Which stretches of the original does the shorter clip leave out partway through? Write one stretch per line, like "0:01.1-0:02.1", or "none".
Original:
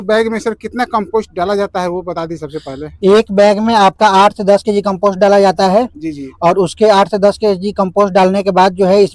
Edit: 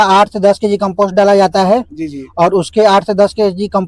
none